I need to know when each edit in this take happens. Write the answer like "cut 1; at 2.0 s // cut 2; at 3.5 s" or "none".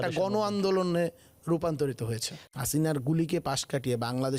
cut 1; at 2.4 s